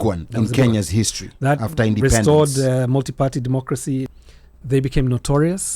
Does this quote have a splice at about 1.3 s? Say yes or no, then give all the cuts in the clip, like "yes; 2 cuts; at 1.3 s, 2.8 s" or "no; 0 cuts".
no; 1 cut; at 4.2 s